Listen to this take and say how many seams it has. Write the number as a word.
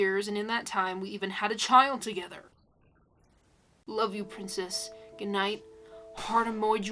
one